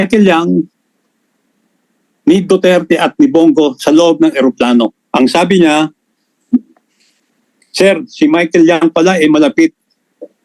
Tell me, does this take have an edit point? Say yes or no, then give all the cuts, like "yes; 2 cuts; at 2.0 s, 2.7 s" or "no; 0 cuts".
yes; 1 cut; at 5.0 s